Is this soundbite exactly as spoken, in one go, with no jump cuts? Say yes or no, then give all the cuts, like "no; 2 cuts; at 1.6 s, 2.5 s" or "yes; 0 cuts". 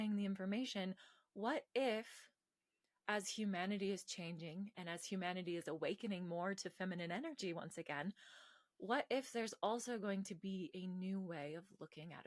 yes; 0 cuts